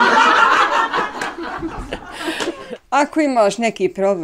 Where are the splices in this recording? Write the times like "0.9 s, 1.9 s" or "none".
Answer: 2.6 s